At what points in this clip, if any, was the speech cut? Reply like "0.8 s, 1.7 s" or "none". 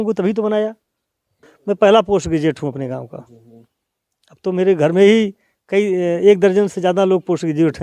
1.5 s